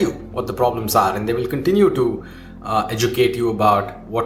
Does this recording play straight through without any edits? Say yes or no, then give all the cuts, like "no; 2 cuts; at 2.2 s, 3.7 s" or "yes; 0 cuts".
yes; 0 cuts